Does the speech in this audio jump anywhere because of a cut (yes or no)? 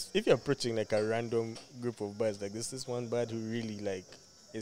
no